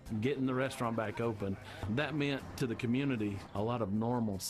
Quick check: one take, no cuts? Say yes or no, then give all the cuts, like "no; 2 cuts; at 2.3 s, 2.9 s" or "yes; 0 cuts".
yes; 0 cuts